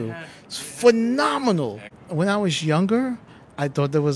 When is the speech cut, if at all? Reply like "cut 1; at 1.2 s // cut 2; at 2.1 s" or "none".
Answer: cut 1; at 2.0 s